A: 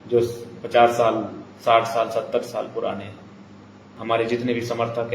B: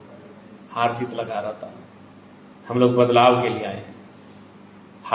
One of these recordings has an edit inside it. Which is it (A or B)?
A